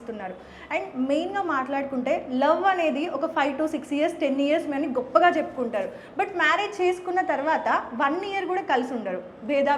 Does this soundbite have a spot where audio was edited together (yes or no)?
no